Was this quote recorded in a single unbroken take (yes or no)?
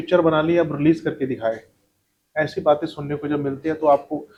yes